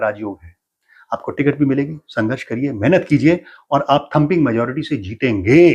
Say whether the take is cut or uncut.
uncut